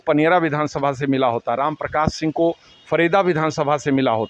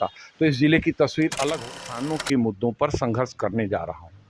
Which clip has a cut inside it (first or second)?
second